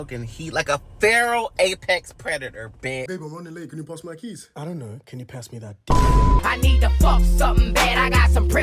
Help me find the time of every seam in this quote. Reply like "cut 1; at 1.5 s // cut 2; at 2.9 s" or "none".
cut 1; at 3.1 s // cut 2; at 6.4 s